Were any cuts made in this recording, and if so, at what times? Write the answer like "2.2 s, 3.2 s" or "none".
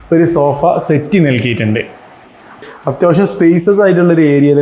2.6 s